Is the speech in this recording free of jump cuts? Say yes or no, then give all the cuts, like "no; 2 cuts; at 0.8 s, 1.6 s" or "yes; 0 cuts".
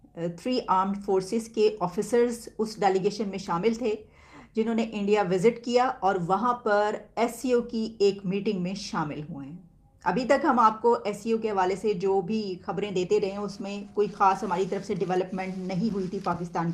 yes; 0 cuts